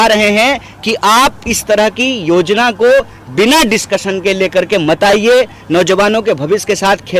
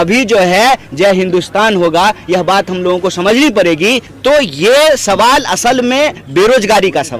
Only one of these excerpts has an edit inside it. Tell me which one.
second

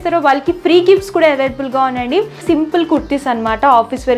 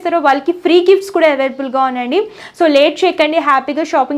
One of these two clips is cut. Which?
first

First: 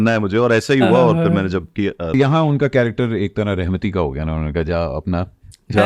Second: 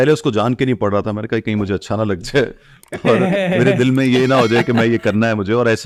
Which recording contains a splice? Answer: first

